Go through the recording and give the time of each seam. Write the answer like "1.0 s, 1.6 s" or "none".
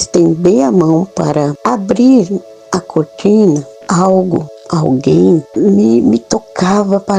1.6 s, 3.7 s, 4.6 s, 5.5 s